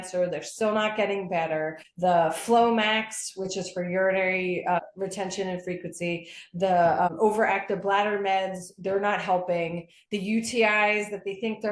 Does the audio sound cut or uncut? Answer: cut